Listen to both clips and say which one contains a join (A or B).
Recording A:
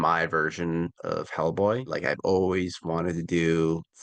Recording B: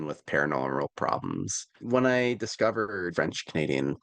B